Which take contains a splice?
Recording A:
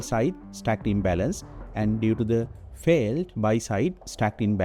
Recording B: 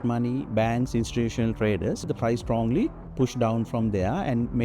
B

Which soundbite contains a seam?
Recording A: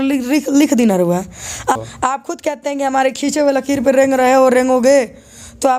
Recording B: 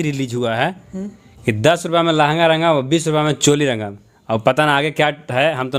A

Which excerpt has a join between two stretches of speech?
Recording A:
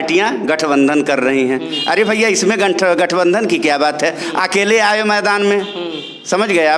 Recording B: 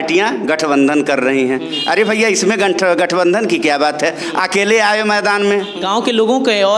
B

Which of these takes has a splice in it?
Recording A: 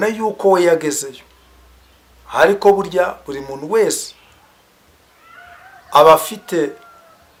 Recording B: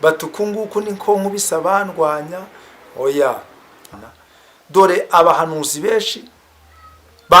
B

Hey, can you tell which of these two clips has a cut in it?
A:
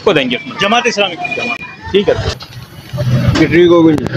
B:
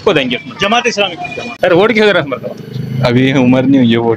B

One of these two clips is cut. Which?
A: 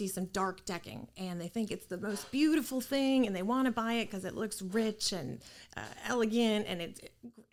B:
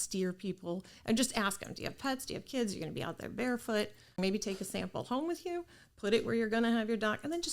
B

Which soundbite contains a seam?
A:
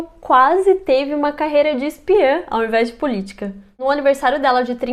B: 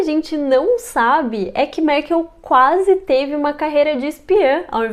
A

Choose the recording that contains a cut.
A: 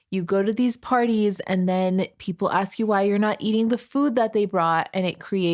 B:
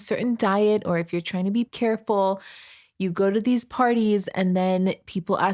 B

